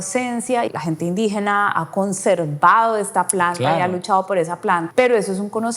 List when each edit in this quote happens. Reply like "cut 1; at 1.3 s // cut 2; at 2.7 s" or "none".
cut 1; at 0.7 s // cut 2; at 4.9 s